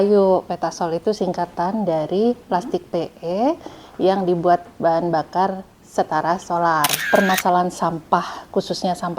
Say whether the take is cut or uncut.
cut